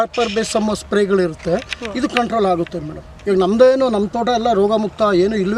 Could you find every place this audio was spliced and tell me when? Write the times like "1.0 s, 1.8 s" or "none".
none